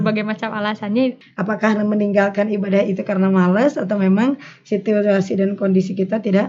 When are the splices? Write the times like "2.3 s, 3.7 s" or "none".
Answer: 1.3 s